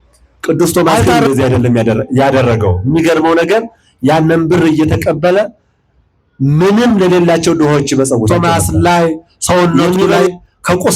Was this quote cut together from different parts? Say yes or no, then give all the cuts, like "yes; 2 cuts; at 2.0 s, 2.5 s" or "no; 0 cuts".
yes; 1 cut; at 8.3 s